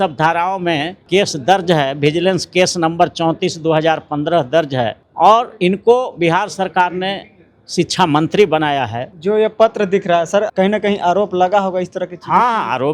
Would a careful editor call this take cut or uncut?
cut